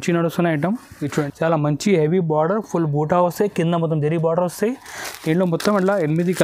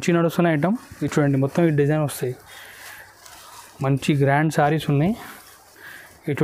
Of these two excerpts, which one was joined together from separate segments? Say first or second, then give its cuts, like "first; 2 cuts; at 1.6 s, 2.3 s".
first; 1 cut; at 1.1 s